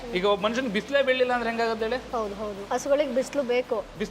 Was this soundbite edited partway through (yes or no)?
yes